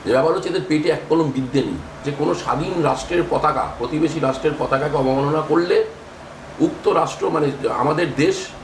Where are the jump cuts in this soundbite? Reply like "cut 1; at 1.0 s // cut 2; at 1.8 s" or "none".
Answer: cut 1; at 2.0 s